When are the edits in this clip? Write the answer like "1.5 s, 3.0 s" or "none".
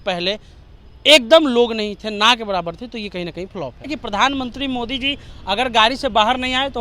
4.0 s